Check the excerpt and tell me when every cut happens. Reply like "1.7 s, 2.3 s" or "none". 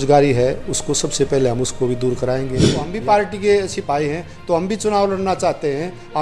2.9 s